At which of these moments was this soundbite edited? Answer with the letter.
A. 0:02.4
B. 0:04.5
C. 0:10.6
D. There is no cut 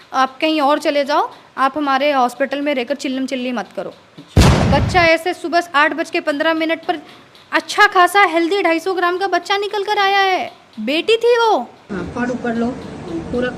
B